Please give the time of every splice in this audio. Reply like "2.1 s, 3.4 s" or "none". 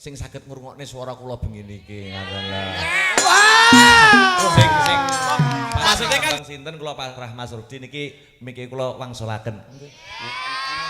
6.4 s